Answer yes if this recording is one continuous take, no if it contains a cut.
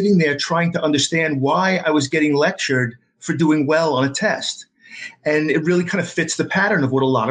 yes